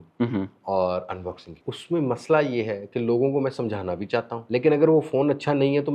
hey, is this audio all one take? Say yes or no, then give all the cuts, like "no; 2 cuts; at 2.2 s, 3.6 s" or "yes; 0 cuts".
no; 2 cuts; at 1.6 s, 4.4 s